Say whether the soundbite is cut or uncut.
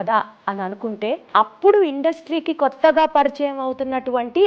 cut